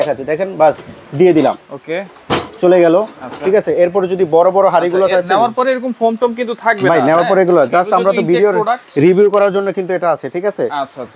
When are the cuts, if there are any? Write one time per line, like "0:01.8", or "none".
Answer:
none